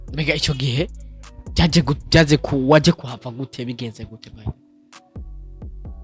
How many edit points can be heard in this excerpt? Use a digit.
0